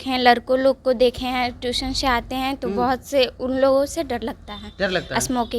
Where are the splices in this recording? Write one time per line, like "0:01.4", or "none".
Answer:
none